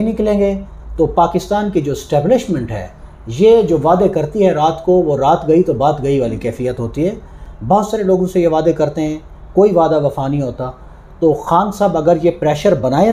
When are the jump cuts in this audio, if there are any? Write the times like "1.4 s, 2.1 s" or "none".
none